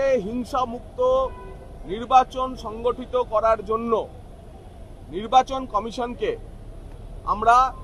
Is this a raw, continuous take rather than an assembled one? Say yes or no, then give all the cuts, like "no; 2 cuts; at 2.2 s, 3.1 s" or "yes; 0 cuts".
yes; 0 cuts